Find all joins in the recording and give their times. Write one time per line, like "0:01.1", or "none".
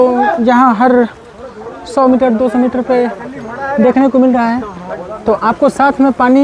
none